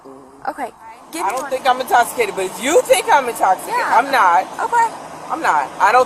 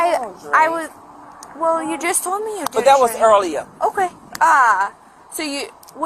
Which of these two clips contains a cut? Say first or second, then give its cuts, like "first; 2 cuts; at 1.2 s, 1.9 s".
first; 1 cut; at 1.1 s